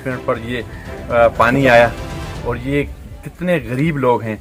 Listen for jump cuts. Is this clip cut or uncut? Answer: uncut